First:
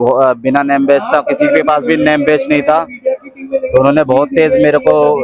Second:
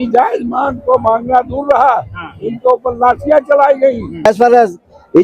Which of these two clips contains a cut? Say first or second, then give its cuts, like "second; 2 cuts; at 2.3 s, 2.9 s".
second; 1 cut; at 4.2 s